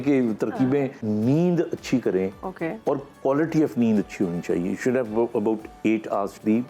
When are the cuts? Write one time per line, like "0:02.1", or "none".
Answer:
0:01.0